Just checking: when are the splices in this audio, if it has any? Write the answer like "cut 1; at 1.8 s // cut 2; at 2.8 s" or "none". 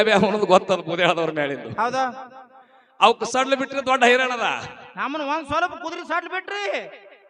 none

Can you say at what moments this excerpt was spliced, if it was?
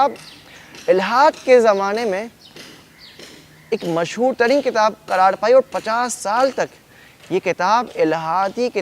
none

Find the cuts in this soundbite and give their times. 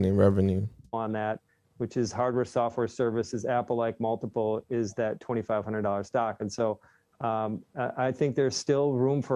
cut 1; at 0.9 s

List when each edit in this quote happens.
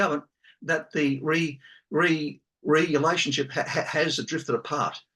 none

